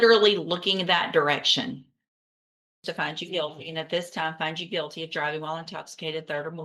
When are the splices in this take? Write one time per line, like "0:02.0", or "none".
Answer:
0:02.8